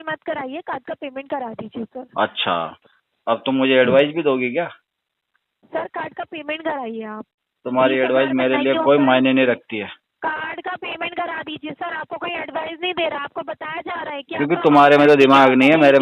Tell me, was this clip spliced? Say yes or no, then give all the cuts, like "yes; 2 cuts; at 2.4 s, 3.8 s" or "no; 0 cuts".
no; 0 cuts